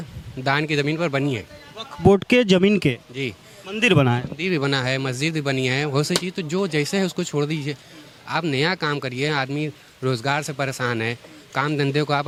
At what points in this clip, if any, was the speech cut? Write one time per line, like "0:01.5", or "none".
none